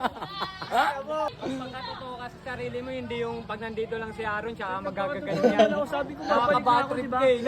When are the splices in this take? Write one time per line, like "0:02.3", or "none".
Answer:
0:01.3